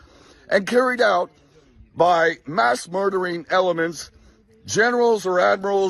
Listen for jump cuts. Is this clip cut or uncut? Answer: uncut